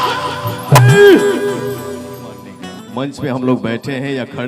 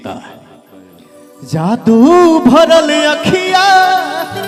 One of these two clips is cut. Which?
first; 1 cut; at 2.3 s

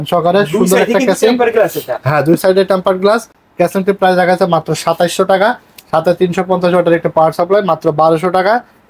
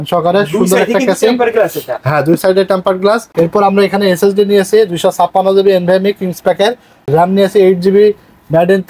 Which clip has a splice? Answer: second; 2 cuts; at 3.3 s, 7.1 s

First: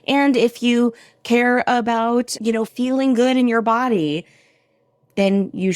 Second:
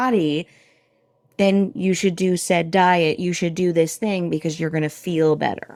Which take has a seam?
first; 1 cut; at 2.7 s

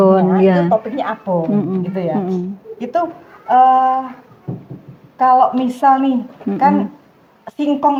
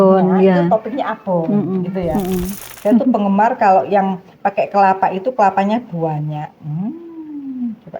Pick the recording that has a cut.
second; 1 cut; at 2.6 s

